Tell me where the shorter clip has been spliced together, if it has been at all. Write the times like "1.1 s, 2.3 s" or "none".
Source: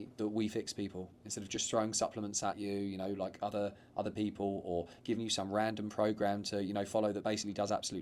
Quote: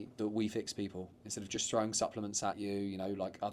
none